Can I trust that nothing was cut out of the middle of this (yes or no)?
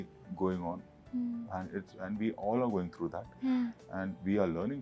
yes